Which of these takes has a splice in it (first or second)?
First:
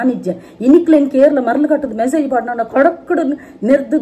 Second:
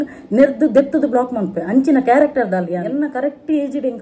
second